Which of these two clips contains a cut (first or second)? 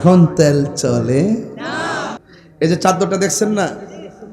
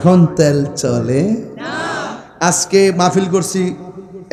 first